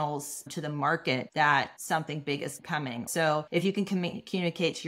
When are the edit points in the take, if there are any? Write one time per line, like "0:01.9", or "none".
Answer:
0:03.1